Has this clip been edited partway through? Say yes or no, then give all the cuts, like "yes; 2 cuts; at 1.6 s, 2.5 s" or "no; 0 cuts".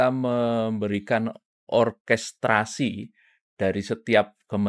no; 0 cuts